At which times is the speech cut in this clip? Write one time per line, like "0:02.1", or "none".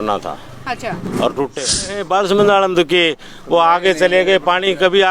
0:01.5